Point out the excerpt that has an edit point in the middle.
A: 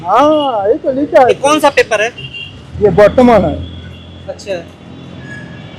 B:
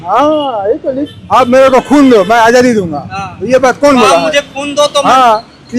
B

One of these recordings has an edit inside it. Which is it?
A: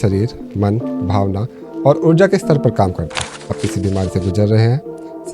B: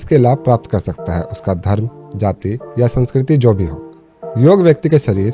A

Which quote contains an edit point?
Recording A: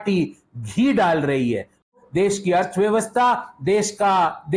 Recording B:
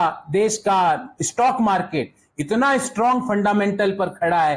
A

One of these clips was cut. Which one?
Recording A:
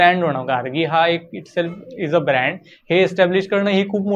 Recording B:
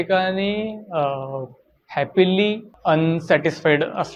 B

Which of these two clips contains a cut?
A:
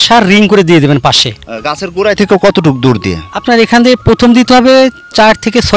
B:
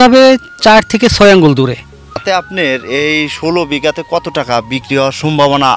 B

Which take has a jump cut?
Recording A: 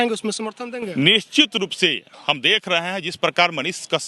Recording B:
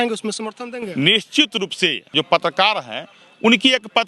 B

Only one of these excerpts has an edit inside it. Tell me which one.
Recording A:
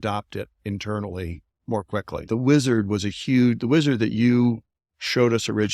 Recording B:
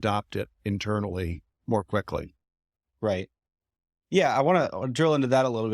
A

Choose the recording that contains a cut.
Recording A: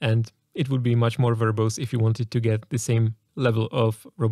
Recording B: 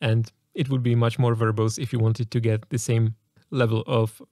A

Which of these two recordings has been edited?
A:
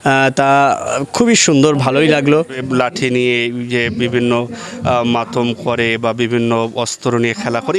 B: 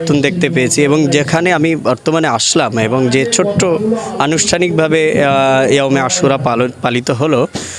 A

